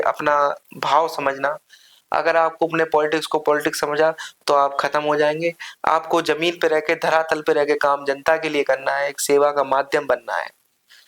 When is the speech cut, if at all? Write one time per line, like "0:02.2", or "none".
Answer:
none